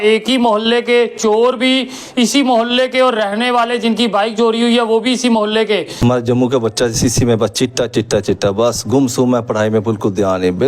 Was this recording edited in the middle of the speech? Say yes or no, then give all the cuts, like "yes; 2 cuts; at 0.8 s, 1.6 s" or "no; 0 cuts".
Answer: yes; 1 cut; at 6.0 s